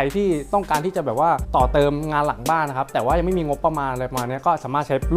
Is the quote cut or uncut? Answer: uncut